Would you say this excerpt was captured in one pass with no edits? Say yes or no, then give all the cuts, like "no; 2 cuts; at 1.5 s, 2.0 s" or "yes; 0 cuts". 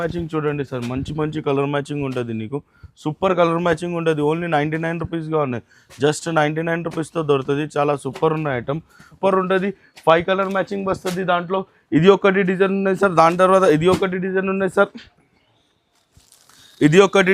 no; 1 cut; at 9.2 s